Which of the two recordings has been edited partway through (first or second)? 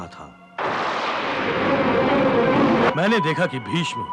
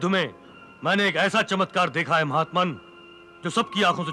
first